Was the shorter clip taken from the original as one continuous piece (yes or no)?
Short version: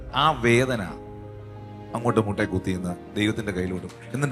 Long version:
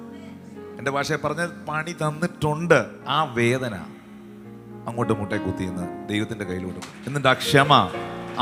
yes